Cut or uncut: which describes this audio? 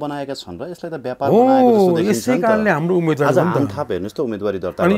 uncut